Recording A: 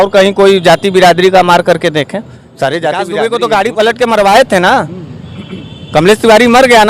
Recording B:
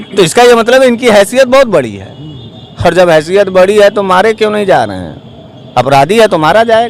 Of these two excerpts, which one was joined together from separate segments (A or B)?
A